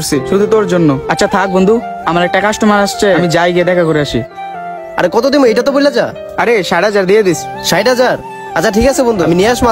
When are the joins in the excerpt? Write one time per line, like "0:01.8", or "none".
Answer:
0:01.1